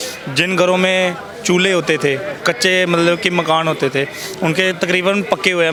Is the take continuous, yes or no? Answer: yes